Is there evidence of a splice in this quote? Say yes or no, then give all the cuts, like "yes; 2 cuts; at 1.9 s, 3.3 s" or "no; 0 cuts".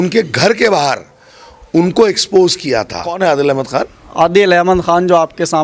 yes; 1 cut; at 3.0 s